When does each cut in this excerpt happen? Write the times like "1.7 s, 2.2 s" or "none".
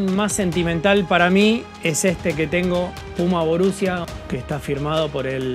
4.0 s